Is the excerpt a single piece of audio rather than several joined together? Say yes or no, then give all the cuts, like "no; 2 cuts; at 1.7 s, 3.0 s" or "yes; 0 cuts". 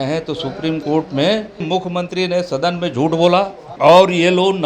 no; 2 cuts; at 1.6 s, 3.6 s